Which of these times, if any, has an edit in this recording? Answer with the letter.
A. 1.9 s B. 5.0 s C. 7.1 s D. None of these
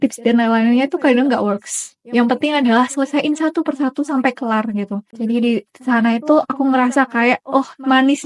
B